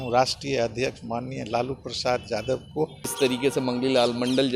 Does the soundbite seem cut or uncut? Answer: cut